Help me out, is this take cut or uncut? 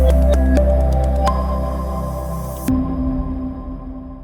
uncut